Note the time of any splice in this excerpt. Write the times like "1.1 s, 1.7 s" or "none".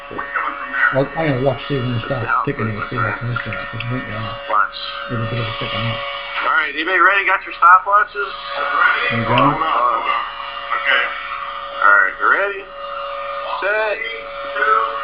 7.0 s